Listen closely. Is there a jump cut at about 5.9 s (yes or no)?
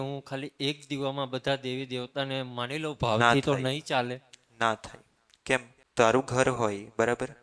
yes